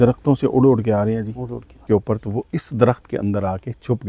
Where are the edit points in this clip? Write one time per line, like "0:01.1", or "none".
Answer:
0:01.8